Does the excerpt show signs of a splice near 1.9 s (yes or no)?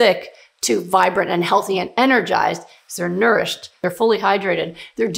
no